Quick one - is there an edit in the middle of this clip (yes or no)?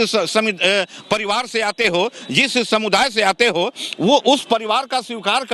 no